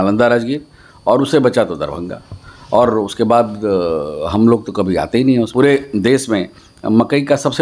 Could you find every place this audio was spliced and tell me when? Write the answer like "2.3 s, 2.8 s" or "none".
5.5 s